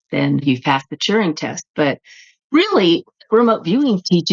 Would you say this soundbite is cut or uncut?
uncut